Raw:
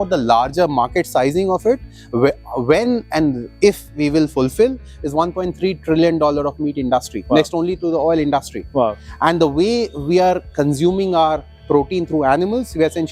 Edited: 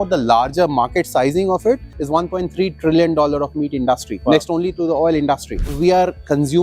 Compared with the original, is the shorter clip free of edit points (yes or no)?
no